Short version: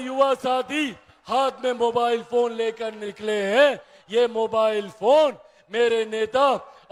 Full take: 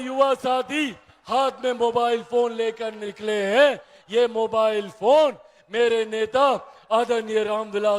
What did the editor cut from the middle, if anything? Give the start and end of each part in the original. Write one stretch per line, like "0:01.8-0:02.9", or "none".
none